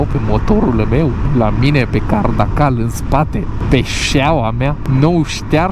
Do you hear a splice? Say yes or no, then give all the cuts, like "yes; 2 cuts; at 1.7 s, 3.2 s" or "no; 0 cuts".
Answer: no; 0 cuts